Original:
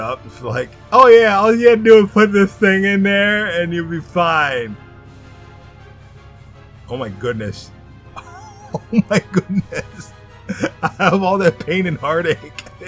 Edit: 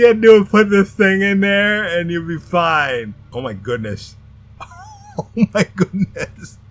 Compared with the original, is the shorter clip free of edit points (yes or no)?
no